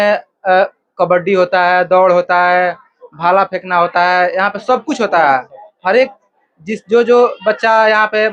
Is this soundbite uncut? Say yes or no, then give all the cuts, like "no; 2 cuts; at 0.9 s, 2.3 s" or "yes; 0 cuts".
yes; 0 cuts